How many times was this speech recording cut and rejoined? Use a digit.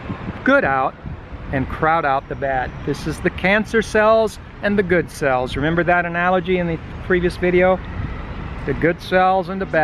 0